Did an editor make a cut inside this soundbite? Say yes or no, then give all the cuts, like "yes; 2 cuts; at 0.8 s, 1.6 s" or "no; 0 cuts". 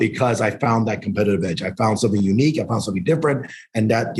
no; 0 cuts